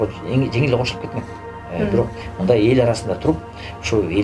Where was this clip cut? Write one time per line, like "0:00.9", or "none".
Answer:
0:02.2